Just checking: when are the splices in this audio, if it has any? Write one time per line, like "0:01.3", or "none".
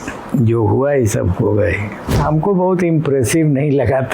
0:02.2